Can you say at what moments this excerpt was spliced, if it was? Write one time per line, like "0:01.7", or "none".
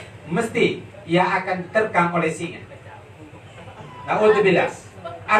none